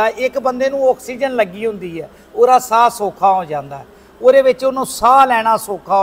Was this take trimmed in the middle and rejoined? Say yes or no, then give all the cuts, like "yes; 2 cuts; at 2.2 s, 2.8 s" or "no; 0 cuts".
no; 0 cuts